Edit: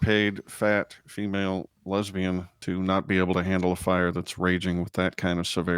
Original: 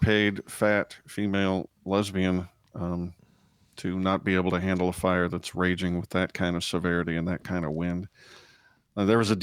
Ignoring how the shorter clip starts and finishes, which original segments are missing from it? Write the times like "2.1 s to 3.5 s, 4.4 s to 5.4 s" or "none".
2.5 s to 3.7 s